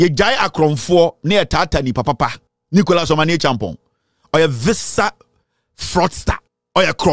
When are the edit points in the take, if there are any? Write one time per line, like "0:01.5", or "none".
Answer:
none